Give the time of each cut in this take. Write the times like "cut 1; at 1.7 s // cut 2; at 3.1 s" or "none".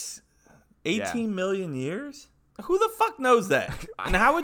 cut 1; at 2.0 s